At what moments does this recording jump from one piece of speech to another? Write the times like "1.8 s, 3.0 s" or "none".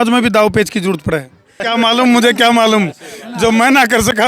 1.6 s